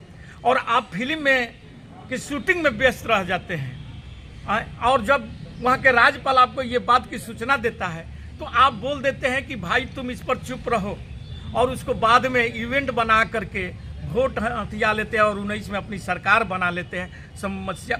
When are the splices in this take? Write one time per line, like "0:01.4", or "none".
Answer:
none